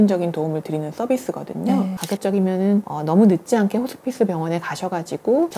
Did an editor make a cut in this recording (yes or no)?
yes